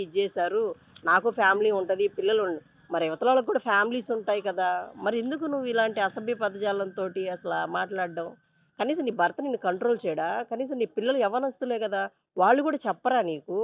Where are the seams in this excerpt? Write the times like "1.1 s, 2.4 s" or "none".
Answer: none